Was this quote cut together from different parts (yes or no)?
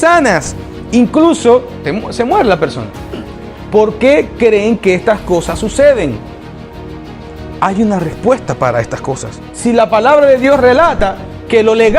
yes